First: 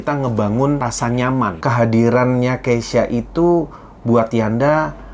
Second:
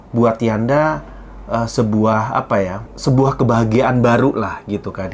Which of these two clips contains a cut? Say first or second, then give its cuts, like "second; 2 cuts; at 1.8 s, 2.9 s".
first; 1 cut; at 1.3 s